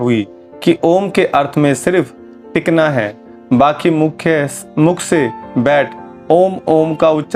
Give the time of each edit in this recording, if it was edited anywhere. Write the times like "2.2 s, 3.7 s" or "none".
none